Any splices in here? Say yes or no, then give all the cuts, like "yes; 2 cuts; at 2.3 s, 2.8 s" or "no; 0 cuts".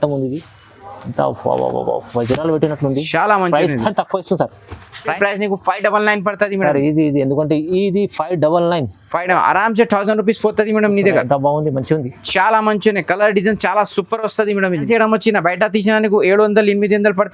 yes; 2 cuts; at 5.1 s, 14.8 s